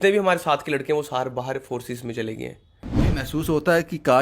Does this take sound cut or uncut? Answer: cut